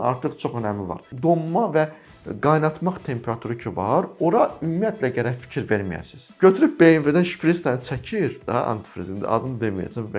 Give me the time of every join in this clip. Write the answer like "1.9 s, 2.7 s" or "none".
1.1 s, 6.3 s